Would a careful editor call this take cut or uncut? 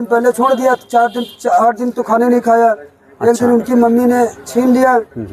uncut